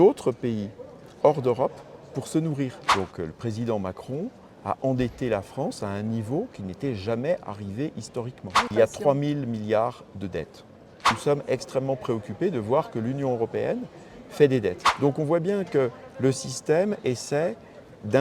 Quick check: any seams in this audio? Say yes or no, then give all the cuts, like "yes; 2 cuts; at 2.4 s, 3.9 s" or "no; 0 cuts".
yes; 4 cuts; at 2.8 s, 8.7 s, 11.1 s, 14.9 s